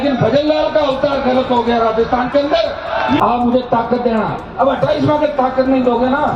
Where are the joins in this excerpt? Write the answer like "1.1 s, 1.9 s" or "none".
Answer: 3.2 s